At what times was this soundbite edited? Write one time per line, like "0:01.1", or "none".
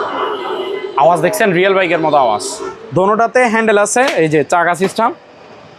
0:02.7